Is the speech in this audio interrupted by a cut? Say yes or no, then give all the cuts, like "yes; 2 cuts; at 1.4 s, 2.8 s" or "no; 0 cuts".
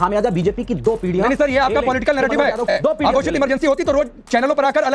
yes; 1 cut; at 2.8 s